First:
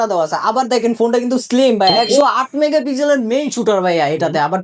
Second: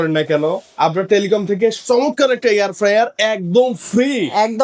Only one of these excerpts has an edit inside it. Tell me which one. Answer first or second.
first